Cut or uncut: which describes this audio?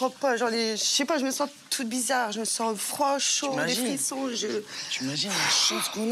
uncut